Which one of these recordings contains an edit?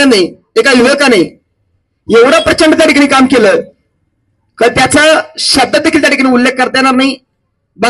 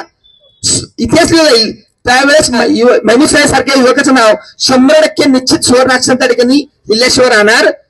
second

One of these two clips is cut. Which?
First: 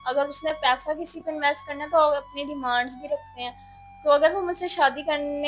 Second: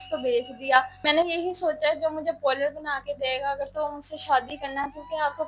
second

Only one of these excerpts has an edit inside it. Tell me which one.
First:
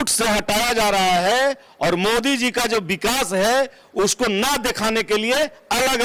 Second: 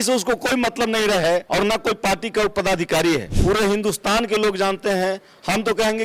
second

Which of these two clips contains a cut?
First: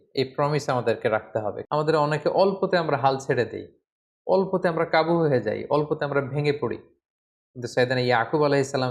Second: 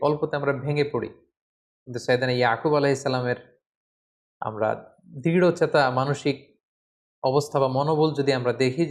first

